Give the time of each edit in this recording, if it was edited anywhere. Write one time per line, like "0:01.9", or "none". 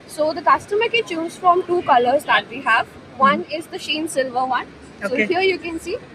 none

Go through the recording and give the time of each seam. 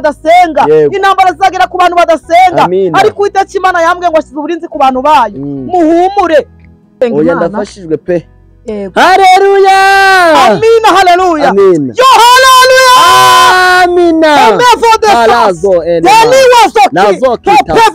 0:06.9

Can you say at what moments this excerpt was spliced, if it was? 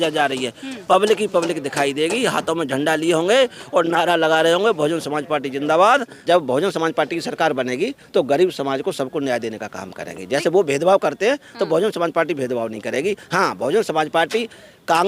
0:06.1

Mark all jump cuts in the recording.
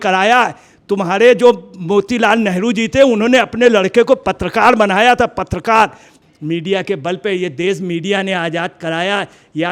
0:06.1

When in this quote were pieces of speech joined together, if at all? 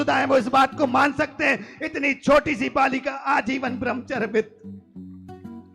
0:04.5

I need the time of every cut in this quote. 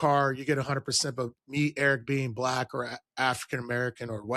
none

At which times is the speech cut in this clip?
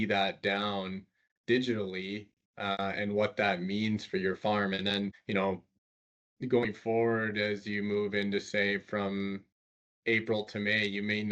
none

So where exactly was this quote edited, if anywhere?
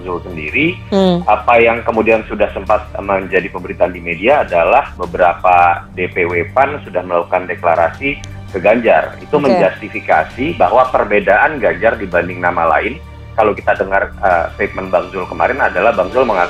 none

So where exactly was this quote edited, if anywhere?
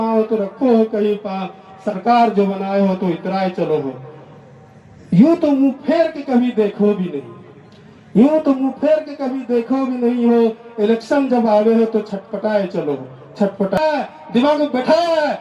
0:13.8

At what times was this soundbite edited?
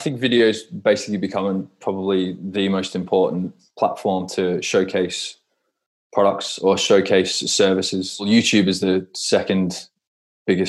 0:03.6
0:08.3

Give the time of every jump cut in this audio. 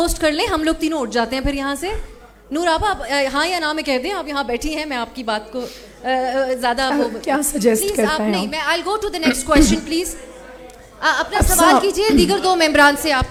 none

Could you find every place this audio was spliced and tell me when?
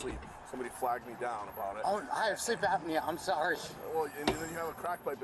0:04.4

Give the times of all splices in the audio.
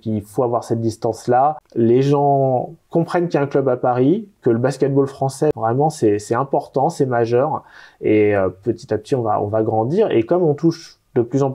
0:01.6
0:05.5

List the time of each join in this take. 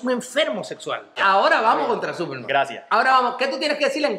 0:01.2

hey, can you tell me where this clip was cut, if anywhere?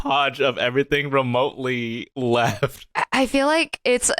0:02.0
0:02.9

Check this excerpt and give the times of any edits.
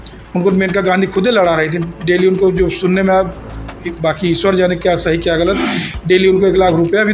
none

